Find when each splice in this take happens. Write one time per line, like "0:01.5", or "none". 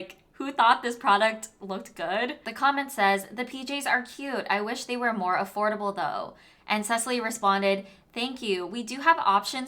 0:02.4